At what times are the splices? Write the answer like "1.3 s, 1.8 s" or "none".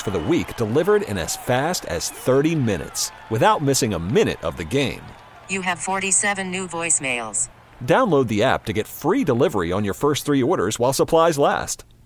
none